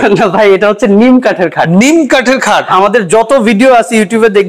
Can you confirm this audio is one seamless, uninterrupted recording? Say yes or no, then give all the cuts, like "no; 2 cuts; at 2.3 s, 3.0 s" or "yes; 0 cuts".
no; 1 cut; at 2.7 s